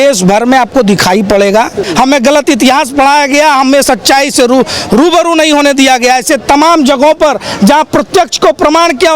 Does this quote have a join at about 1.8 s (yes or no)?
yes